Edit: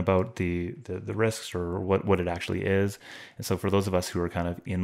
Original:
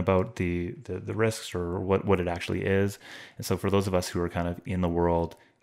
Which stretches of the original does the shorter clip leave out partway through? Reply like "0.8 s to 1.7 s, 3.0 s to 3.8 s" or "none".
none